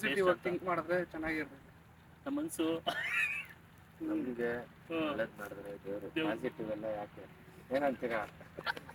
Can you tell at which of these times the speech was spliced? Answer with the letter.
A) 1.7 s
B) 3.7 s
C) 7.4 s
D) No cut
D